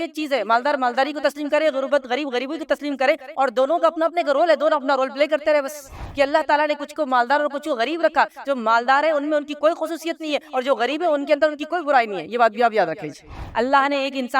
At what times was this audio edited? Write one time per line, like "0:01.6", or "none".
0:06.0
0:13.3